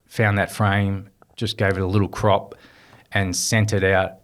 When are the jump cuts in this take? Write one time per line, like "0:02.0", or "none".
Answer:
none